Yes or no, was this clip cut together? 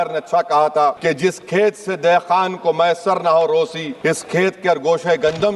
yes